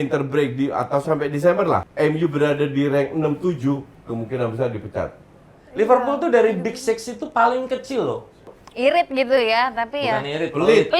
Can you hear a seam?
yes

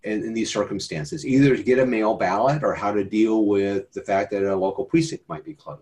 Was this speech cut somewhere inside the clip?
no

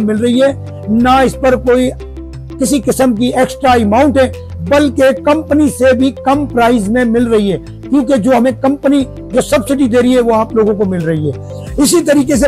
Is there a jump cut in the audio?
no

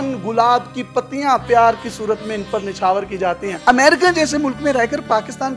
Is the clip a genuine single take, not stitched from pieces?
no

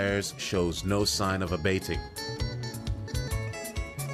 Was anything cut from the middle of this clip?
yes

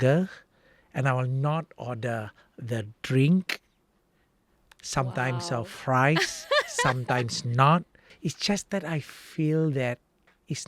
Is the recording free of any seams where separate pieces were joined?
no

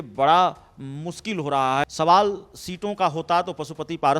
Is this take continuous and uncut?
no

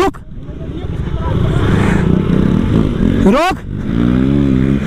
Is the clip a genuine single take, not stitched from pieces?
no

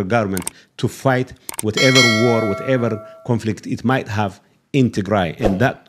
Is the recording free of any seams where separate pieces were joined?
yes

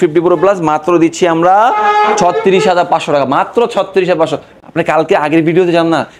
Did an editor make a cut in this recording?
no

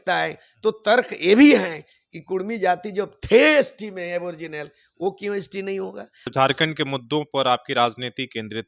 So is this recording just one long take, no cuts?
no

